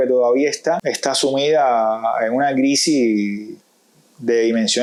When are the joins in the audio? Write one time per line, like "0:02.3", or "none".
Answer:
none